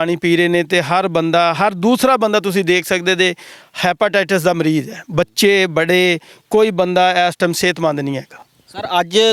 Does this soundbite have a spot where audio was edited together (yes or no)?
no